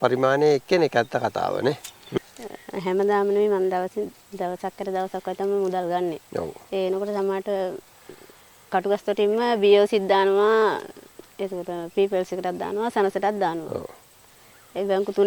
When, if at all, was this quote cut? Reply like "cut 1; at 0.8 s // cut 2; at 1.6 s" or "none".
cut 1; at 2.2 s